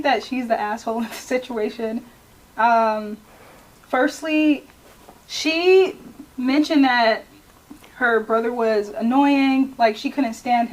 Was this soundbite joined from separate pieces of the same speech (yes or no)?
no